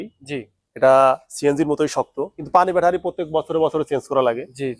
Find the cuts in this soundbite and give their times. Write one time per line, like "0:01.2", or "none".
0:02.4

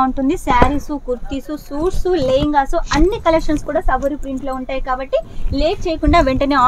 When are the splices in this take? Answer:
none

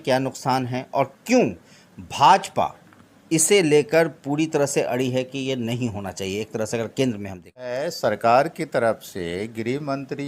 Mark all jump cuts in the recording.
0:07.7

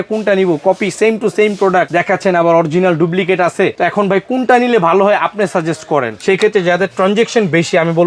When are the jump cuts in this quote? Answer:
0:01.9
0:03.7
0:06.1

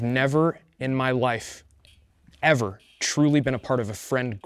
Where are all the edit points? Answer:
none

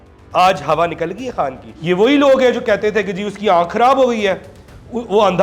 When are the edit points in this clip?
0:01.7

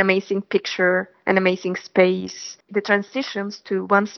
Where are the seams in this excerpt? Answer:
0:02.5

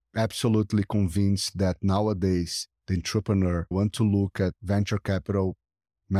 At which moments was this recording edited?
0:03.7
0:04.6

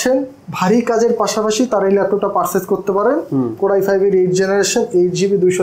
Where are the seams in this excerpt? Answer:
none

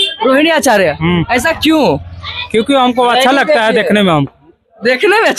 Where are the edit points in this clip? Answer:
none

